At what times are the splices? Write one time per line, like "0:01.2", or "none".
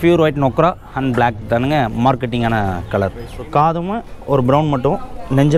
0:03.5